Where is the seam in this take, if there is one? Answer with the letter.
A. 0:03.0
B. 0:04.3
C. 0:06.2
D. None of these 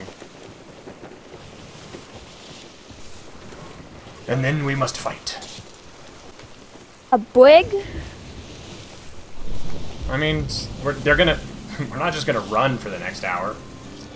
A